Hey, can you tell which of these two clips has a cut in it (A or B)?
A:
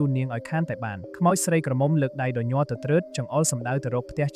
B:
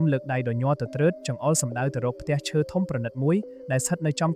A